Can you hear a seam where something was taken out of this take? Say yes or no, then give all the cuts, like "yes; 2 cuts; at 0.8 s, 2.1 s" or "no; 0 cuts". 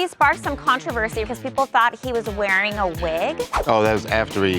yes; 1 cut; at 1.2 s